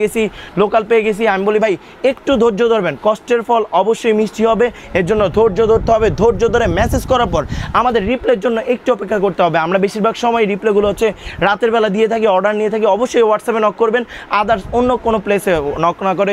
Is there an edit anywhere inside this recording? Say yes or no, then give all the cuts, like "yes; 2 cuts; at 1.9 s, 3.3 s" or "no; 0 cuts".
no; 0 cuts